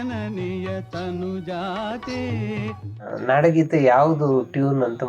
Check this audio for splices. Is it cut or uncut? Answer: cut